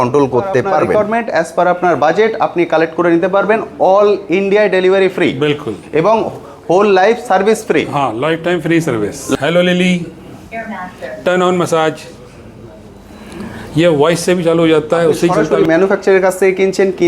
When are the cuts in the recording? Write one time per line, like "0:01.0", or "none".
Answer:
0:00.9
0:09.3
0:15.4